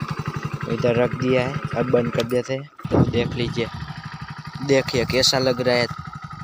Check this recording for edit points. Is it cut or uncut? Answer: cut